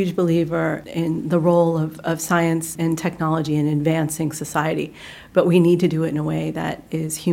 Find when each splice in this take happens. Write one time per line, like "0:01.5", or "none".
0:00.8
0:02.7